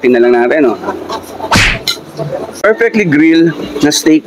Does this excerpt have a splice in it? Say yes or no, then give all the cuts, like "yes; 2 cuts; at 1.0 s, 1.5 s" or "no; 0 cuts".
yes; 1 cut; at 2.7 s